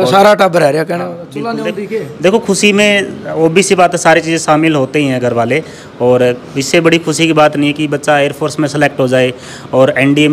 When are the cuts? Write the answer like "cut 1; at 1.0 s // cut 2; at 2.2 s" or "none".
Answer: none